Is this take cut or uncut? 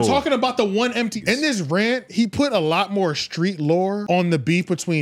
cut